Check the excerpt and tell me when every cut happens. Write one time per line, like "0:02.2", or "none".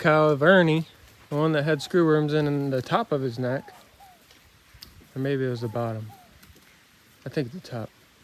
none